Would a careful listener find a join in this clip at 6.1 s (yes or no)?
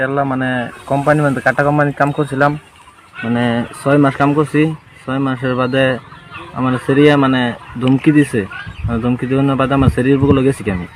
no